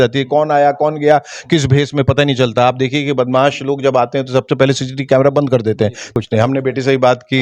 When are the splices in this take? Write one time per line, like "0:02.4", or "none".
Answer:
0:06.0